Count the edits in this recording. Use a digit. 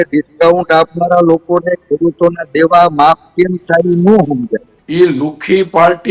1